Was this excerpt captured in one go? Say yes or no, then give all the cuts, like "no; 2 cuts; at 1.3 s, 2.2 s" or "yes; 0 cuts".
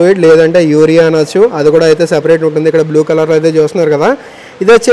yes; 0 cuts